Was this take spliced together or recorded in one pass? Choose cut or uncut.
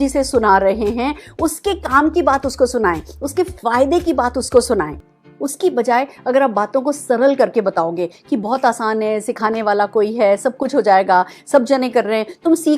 cut